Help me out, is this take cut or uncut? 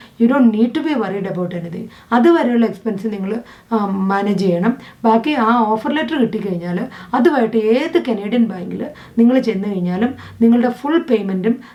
uncut